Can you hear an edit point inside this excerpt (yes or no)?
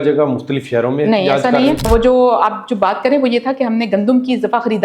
yes